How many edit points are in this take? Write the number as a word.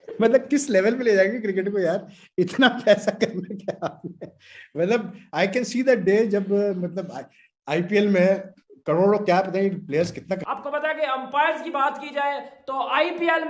one